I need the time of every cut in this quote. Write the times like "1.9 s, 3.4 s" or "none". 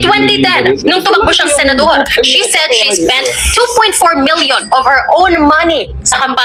none